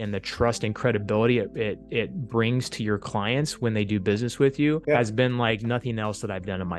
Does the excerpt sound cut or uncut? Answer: cut